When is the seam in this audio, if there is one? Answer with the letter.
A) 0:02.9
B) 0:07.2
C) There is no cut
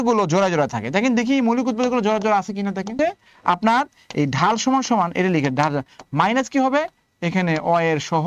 A